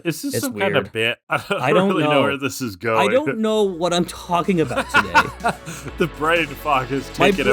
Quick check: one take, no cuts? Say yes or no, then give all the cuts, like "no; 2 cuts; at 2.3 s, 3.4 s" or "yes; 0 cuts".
yes; 0 cuts